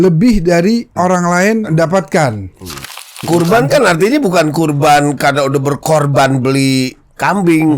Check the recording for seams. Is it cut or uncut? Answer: cut